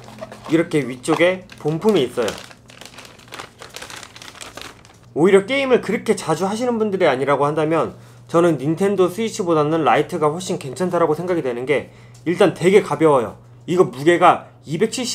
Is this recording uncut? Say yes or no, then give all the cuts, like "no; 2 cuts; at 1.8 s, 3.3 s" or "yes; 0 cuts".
yes; 0 cuts